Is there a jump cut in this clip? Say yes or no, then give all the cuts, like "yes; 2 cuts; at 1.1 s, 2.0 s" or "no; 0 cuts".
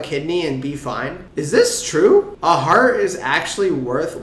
yes; 2 cuts; at 1.2 s, 2.3 s